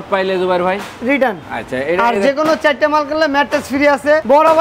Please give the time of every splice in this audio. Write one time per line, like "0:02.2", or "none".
none